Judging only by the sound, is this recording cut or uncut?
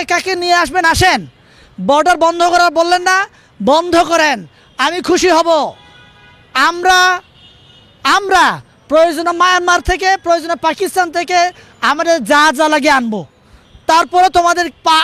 uncut